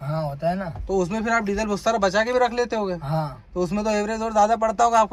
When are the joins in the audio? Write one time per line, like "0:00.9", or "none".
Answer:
none